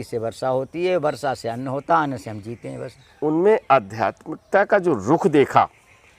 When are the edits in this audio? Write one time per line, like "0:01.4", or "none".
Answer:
0:03.1